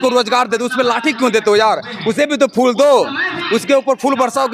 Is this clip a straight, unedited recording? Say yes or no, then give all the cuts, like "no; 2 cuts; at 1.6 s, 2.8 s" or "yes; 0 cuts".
yes; 0 cuts